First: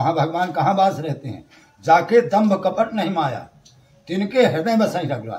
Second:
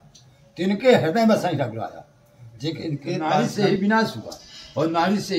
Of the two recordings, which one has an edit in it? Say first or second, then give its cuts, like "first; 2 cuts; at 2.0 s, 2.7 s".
second; 1 cut; at 3.4 s